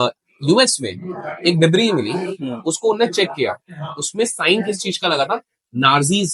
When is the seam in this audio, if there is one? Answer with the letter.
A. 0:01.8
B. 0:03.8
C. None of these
C